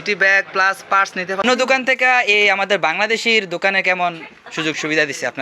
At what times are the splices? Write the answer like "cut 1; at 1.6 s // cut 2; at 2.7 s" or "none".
cut 1; at 1.4 s